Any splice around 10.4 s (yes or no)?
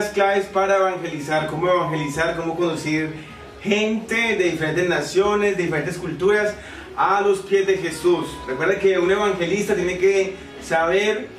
no